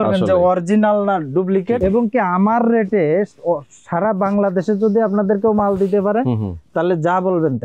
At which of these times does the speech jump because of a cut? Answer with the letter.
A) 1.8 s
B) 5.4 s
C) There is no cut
A